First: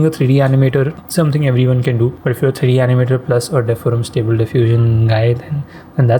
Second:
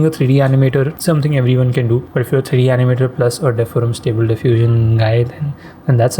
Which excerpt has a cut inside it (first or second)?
second